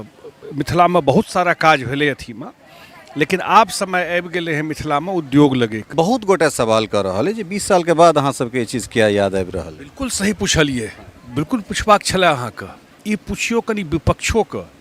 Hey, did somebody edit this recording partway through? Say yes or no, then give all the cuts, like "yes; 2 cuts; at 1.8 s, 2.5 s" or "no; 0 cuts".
yes; 1 cut; at 5.9 s